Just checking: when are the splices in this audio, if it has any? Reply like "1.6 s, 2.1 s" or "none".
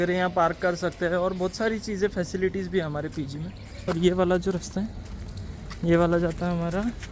3.9 s